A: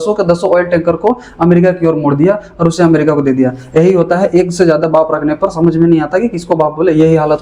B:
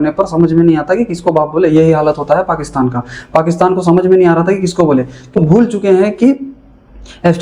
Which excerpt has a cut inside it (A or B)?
B